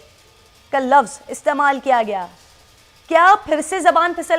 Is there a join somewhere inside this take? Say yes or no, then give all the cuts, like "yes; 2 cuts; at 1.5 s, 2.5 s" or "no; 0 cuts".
no; 0 cuts